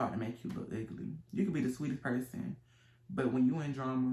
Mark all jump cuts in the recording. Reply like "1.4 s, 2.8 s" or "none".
none